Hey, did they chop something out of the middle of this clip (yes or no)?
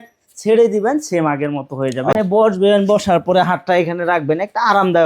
yes